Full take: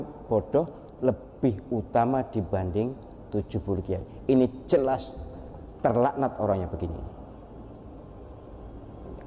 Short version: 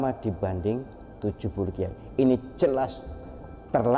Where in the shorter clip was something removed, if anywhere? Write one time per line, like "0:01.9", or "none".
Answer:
none